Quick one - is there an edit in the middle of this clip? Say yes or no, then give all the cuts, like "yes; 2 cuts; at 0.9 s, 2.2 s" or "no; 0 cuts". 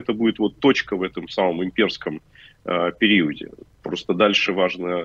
no; 0 cuts